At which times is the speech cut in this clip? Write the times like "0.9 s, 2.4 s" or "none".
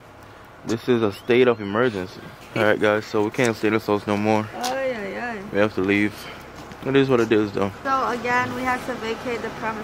2.5 s, 7.8 s